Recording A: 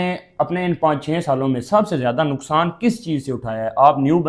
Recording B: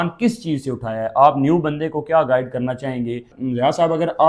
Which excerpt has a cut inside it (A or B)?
B